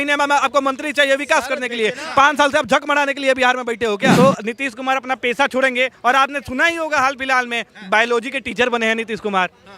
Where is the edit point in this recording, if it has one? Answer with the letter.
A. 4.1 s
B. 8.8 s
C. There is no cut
A